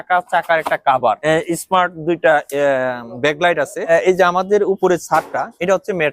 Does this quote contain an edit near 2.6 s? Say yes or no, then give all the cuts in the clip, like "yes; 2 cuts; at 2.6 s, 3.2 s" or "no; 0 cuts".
no; 2 cuts; at 1.2 s, 3.9 s